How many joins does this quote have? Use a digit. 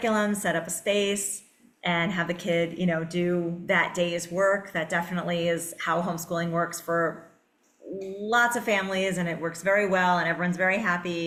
0